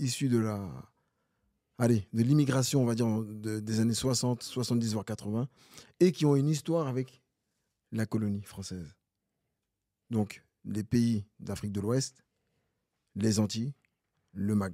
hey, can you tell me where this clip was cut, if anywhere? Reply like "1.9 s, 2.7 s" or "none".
none